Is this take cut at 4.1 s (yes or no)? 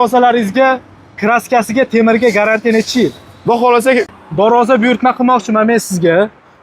yes